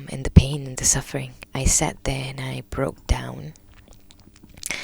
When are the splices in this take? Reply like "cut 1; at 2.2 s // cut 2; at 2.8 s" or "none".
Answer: cut 1; at 1.4 s